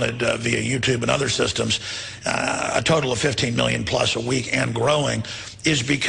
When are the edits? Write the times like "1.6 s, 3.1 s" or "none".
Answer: 3.0 s